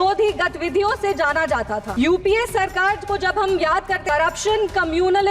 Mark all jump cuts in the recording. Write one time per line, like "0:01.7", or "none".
0:01.9
0:04.0